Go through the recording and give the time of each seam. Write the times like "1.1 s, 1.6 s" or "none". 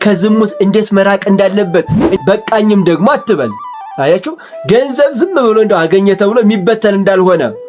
2.2 s

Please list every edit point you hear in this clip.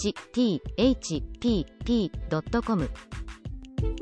2.9 s

